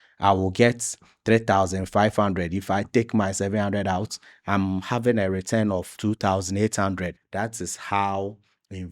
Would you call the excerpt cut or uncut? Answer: cut